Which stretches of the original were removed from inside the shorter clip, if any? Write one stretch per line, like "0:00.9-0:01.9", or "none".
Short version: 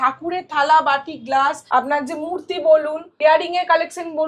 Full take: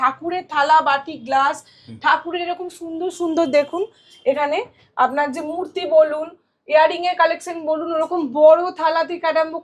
0:01.6-0:04.9
0:06.3-0:06.5